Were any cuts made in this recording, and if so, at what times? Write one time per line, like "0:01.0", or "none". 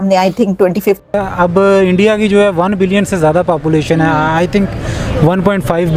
0:01.0